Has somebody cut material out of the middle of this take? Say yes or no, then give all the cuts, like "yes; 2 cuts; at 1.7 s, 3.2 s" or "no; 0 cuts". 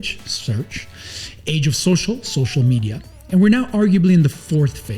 no; 0 cuts